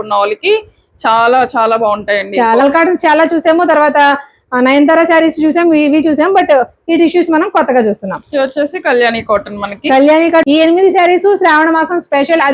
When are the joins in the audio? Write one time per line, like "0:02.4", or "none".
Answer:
0:02.6
0:10.4